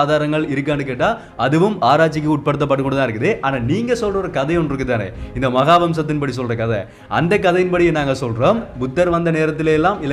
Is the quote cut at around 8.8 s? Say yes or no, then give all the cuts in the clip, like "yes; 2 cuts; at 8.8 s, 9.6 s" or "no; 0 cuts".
yes; 1 cut; at 8.8 s